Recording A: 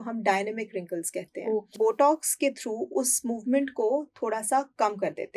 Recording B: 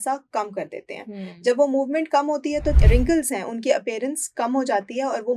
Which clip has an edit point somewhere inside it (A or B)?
A